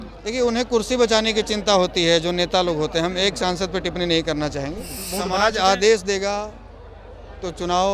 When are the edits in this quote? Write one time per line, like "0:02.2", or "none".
0:05.0